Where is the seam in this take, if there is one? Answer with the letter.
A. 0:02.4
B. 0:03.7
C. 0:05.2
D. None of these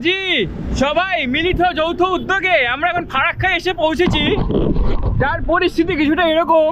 D